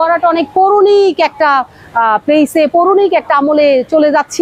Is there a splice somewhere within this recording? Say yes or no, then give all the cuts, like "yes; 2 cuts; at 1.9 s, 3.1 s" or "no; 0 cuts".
no; 0 cuts